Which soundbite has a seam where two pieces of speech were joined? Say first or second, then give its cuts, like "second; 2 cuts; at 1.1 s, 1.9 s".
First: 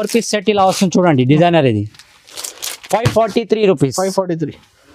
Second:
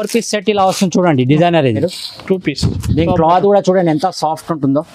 second; 1 cut; at 1.8 s